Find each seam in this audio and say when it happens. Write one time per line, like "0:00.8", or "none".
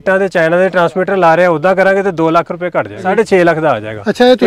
0:03.1